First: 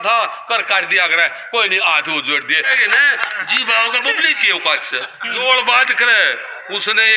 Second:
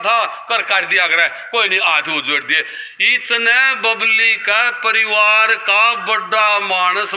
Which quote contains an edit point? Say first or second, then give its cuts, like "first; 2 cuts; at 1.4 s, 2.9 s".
first; 2 cuts; at 2.7 s, 5.2 s